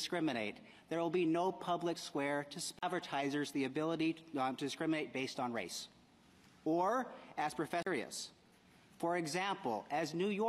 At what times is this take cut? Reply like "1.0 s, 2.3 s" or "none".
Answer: none

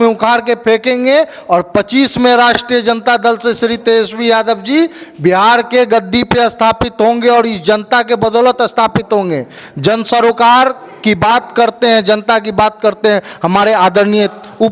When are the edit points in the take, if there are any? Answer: none

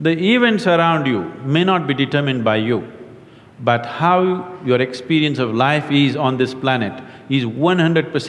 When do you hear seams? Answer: none

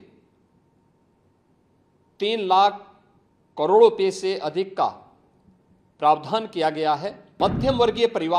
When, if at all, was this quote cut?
7.2 s

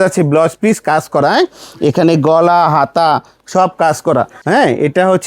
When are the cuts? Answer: 4.4 s

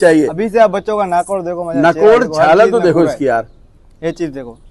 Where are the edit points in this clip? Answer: none

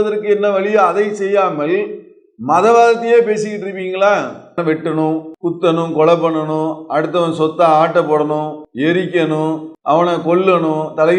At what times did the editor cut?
4.6 s, 5.3 s, 8.6 s, 9.7 s

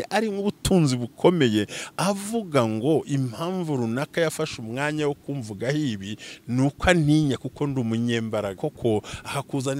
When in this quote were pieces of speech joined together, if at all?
8.6 s

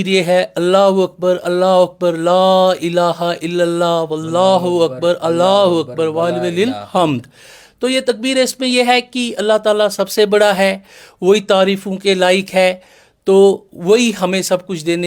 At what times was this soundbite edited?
none

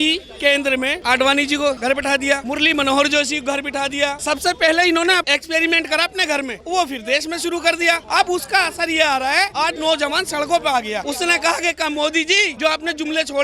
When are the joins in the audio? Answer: 1.0 s, 1.9 s, 4.2 s, 5.2 s, 6.6 s, 8.0 s, 9.5 s, 11.0 s, 12.5 s

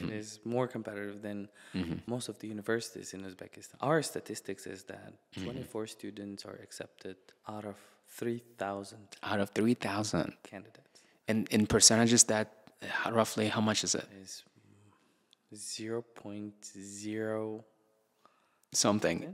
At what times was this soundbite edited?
2.0 s, 3.6 s, 7.3 s

